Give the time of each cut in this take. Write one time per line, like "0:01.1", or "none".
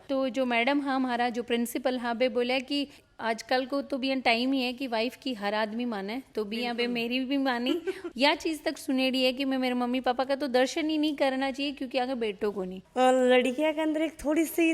0:02.9
0:08.1
0:12.9